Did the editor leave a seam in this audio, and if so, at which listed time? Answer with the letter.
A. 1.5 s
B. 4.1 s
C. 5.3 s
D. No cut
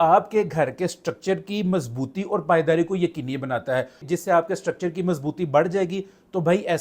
B